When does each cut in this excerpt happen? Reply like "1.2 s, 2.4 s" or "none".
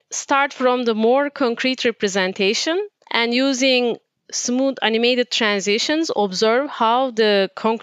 3.0 s